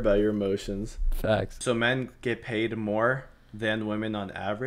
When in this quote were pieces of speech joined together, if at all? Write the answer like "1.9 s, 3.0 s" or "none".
1.6 s